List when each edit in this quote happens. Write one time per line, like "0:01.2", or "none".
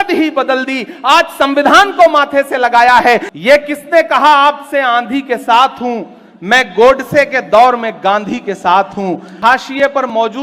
0:03.3
0:09.2